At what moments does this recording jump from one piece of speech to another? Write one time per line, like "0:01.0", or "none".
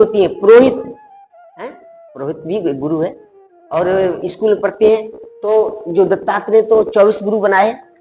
none